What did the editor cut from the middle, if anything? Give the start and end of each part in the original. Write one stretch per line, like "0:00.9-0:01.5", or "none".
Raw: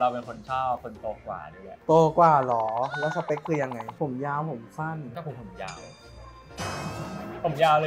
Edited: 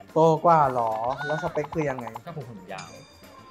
0:03.9-0:05.1